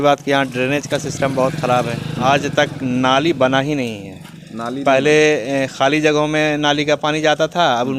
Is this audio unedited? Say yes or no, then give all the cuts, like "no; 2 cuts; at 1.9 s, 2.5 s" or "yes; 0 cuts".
yes; 0 cuts